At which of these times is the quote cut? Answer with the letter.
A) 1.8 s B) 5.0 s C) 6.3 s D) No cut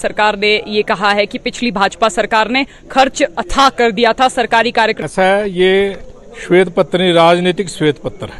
B